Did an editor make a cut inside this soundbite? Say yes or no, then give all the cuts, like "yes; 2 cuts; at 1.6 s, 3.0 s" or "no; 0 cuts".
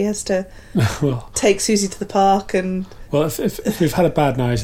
yes; 1 cut; at 2.9 s